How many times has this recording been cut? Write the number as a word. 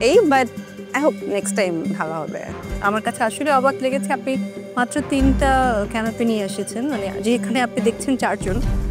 one